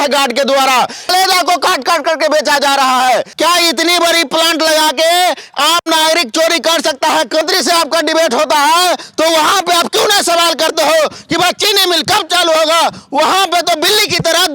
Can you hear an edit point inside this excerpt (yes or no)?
yes